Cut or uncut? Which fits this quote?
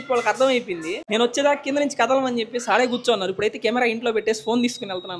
cut